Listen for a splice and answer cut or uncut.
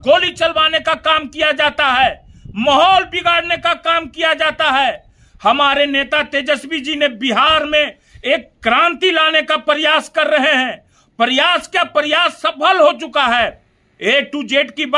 uncut